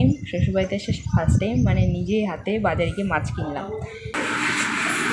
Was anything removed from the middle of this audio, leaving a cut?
yes; 1 cut; at 4.1 s

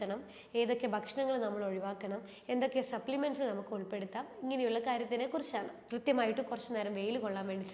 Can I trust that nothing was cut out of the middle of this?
no; 1 cut; at 5.8 s

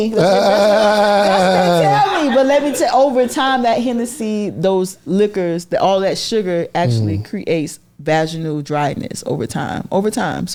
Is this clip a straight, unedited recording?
yes; 0 cuts

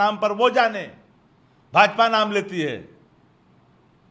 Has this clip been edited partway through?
no; 0 cuts

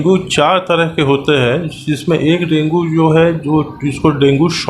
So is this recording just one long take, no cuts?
yes; 0 cuts

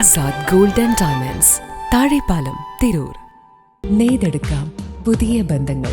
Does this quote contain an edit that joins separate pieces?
yes; 1 cut; at 3.8 s

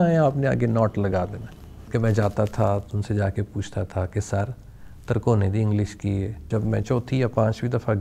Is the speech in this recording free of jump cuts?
no; 2 cuts; at 1.9 s, 6.4 s

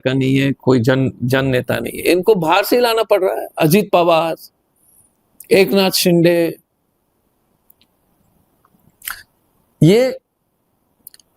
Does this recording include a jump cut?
no; 0 cuts

